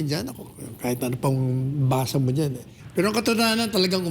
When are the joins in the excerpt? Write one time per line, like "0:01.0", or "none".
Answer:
0:02.7